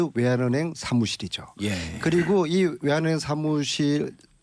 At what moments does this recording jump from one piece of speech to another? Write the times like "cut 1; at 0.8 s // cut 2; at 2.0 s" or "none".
cut 1; at 1.6 s